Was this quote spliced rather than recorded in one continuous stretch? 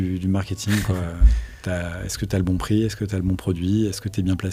no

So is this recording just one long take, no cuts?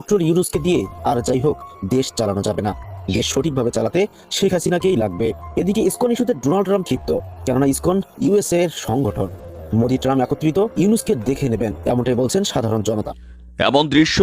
no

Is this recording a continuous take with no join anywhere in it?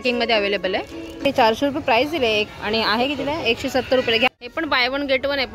no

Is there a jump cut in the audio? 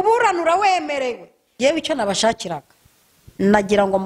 yes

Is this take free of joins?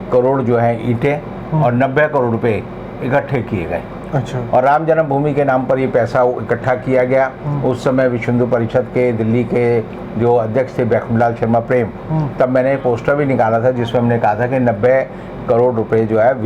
yes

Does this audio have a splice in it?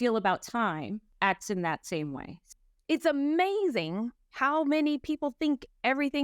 yes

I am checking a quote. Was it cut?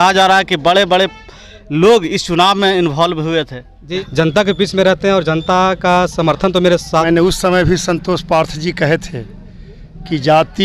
yes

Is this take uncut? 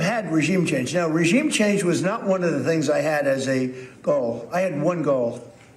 yes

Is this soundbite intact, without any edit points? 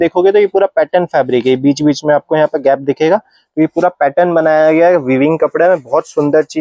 yes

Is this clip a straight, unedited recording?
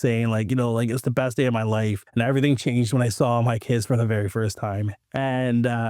no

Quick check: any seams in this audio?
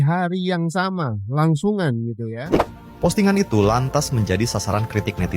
yes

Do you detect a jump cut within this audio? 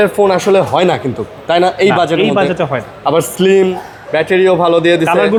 no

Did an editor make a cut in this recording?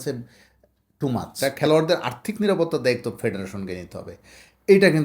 yes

